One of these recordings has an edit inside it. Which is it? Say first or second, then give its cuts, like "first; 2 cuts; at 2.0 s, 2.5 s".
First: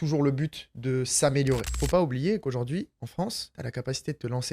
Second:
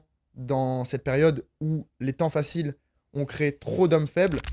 first; 2 cuts; at 1.7 s, 3.2 s